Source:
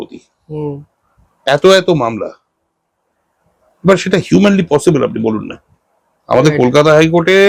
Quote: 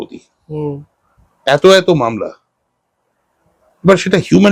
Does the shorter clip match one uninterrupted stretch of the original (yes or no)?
yes